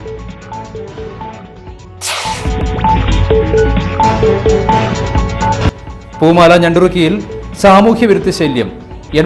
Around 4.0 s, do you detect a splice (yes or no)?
no